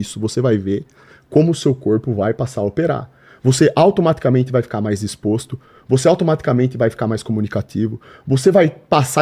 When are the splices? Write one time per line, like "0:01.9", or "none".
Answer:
none